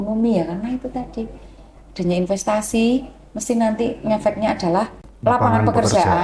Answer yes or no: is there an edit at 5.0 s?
yes